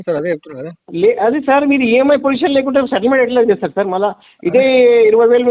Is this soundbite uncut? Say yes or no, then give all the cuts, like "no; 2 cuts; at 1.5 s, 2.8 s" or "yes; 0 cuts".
yes; 0 cuts